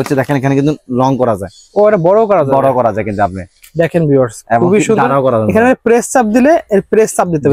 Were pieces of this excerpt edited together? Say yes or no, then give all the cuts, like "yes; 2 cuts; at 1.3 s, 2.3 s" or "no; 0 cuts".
no; 0 cuts